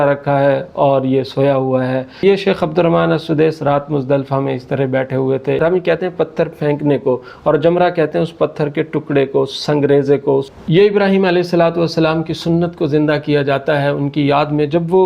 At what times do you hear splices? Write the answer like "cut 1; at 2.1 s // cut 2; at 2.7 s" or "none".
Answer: cut 1; at 2.2 s // cut 2; at 5.6 s // cut 3; at 10.5 s